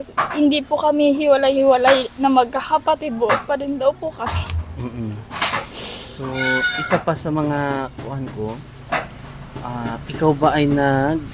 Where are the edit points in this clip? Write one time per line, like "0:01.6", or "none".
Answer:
none